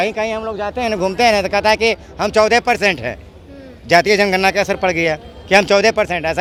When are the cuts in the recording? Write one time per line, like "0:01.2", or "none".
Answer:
none